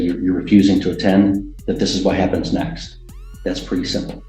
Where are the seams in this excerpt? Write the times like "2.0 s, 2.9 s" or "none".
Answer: none